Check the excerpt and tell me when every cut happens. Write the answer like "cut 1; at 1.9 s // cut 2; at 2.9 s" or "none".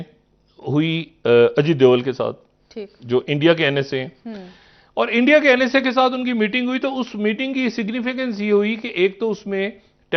none